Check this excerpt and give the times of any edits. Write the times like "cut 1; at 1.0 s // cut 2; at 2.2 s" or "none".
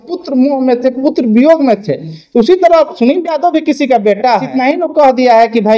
cut 1; at 4.5 s